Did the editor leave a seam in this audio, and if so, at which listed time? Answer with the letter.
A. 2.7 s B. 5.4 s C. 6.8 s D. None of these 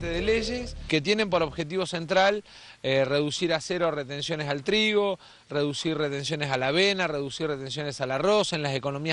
D